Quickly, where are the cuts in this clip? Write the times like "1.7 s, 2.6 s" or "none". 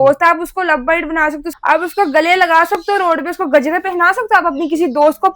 1.5 s